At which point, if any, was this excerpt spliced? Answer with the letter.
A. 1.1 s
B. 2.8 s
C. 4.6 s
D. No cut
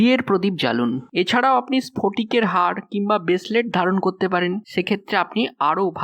A